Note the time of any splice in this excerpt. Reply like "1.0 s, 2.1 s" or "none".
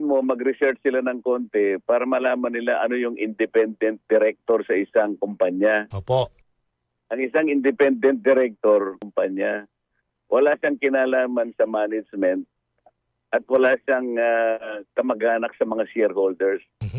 9.0 s